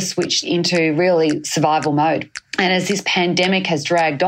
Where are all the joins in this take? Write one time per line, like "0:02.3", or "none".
0:02.5